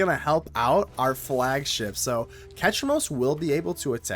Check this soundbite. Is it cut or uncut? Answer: uncut